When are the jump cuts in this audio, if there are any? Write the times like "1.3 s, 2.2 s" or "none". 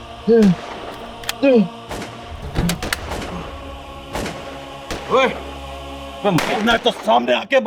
none